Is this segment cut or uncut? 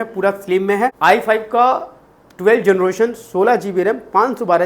cut